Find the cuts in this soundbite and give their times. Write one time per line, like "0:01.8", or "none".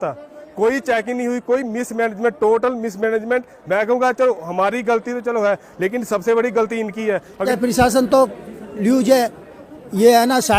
0:07.5